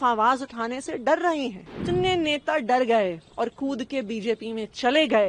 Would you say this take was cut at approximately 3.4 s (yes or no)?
no